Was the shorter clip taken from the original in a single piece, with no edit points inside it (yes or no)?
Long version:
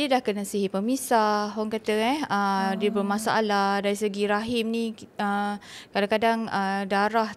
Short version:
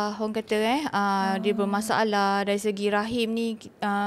yes